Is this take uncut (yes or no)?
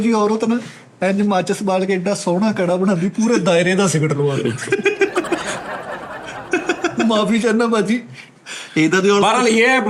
yes